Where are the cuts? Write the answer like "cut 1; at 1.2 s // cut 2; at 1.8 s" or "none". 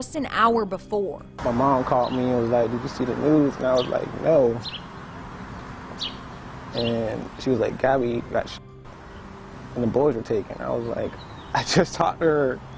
none